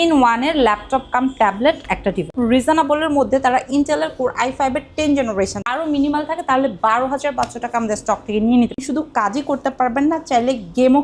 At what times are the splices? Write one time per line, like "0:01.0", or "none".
0:02.3
0:05.6
0:08.8